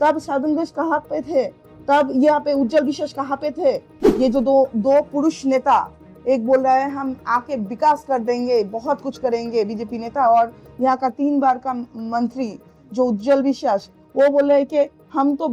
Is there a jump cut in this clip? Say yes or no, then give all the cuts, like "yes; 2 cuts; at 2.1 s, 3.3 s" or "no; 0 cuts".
no; 0 cuts